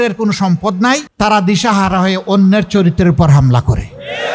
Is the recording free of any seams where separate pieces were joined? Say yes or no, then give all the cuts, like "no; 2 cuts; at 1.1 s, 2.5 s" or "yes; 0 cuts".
no; 1 cut; at 1.1 s